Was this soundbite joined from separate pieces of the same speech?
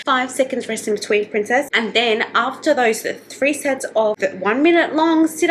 no; 0 cuts

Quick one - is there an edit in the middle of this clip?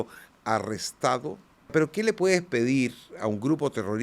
yes; 1 cut; at 1.7 s

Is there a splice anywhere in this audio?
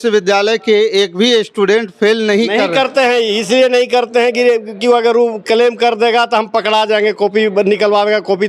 no; 0 cuts

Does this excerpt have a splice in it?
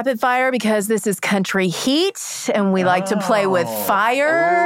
no; 0 cuts

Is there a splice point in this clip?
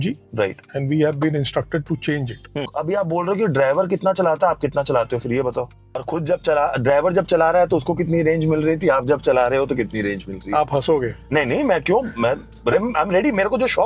yes; 2 cuts; at 2.7 s, 6.0 s

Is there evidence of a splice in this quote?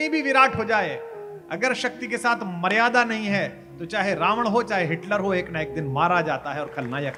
no; 0 cuts

